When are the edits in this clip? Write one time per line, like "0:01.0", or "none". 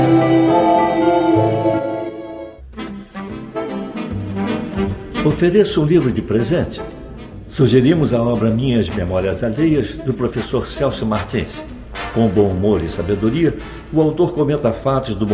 0:02.6